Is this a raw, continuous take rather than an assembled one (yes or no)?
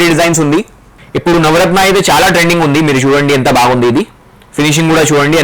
no